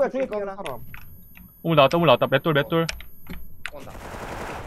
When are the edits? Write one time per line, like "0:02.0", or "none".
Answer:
none